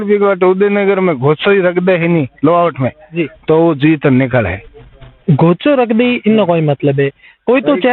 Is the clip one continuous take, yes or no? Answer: yes